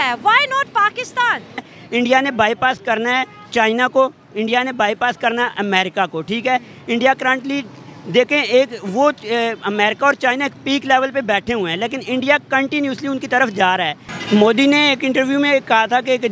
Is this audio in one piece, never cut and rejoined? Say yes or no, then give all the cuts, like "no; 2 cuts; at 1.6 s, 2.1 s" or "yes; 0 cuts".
no; 2 cuts; at 1.8 s, 14.1 s